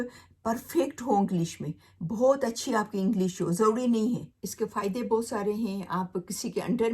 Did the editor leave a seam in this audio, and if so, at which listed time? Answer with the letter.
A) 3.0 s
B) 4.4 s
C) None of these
B